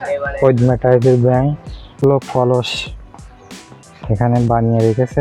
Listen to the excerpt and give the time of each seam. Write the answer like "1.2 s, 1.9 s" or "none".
2.0 s